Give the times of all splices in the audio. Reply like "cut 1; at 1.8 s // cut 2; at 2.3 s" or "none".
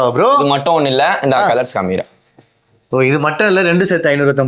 none